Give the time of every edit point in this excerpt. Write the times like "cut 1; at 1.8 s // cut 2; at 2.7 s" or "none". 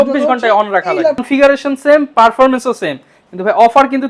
cut 1; at 1.2 s

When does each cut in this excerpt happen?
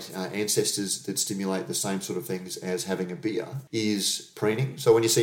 cut 1; at 3.6 s

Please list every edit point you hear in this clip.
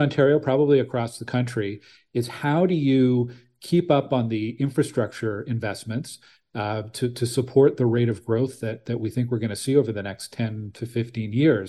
none

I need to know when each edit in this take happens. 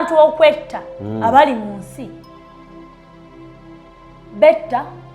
none

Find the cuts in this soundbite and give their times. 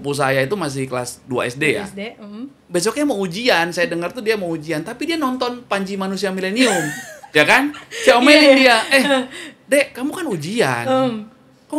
cut 1; at 2.5 s

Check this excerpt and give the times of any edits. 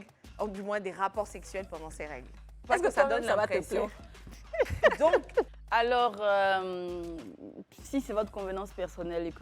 cut 1; at 2.5 s // cut 2; at 5.5 s

